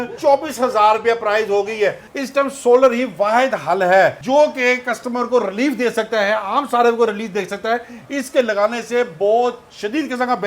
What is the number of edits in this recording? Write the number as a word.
one